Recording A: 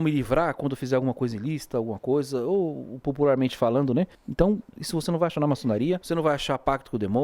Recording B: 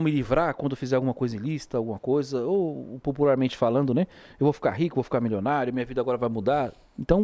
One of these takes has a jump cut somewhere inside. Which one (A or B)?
A